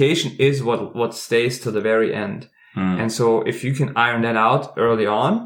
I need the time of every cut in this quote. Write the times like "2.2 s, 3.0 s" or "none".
none